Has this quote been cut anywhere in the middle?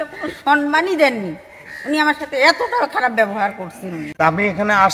yes; 1 cut; at 4.0 s

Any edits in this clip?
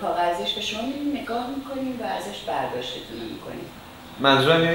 yes; 1 cut; at 3.8 s

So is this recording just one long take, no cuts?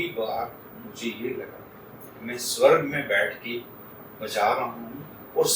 yes; 0 cuts

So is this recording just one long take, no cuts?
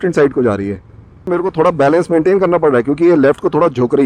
no; 1 cut; at 1.3 s

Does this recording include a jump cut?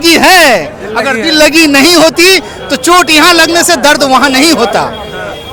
no; 0 cuts

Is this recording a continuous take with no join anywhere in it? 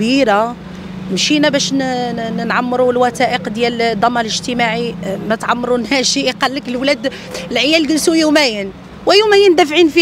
yes; 0 cuts

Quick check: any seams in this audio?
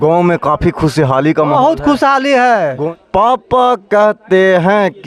yes; 1 cut; at 2.8 s

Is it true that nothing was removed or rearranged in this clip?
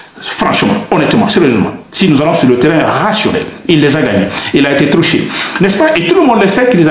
yes; 0 cuts

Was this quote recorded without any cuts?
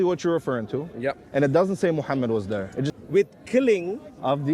no; 1 cut; at 3.0 s

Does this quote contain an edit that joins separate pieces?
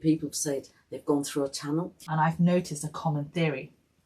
yes; 1 cut; at 2.0 s

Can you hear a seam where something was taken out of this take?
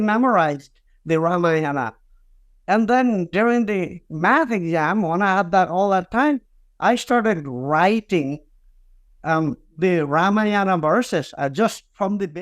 no; 0 cuts

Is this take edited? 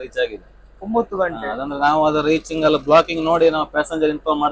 no; 0 cuts

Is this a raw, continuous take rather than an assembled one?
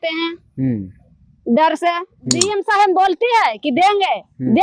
no; 1 cut; at 2.4 s

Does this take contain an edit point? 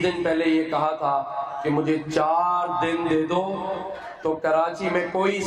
no; 0 cuts

